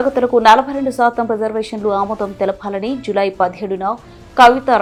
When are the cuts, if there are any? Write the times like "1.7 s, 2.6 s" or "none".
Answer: none